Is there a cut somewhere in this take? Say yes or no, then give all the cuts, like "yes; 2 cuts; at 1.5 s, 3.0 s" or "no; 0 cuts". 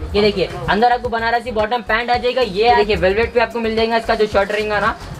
yes; 1 cut; at 2.8 s